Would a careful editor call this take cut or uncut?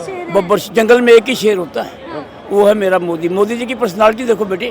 uncut